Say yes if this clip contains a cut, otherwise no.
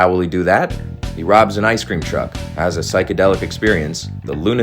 yes